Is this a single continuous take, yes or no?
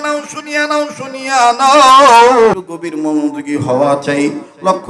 no